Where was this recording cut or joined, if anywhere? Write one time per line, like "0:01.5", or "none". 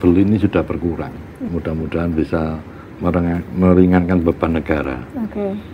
0:01.5